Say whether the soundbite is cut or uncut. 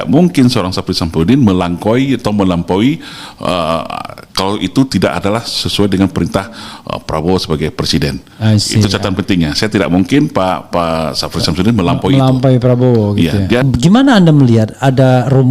cut